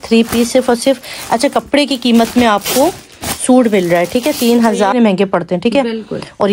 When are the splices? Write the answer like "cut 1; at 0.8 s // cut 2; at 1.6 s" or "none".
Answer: cut 1; at 4.9 s